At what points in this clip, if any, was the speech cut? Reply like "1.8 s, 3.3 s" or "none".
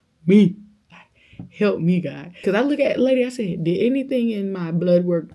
2.4 s